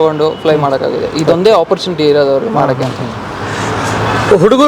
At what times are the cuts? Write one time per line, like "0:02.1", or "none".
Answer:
none